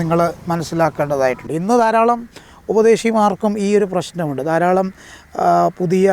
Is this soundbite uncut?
no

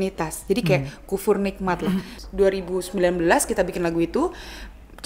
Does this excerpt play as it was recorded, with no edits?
no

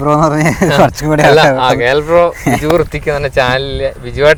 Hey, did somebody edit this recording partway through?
no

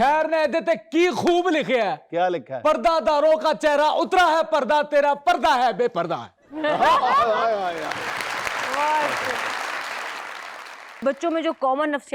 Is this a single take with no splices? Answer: no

